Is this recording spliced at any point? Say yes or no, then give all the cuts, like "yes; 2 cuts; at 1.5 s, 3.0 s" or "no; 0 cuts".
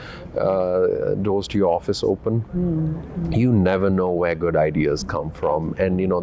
no; 0 cuts